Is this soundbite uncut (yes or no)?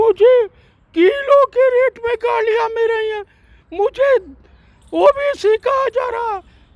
yes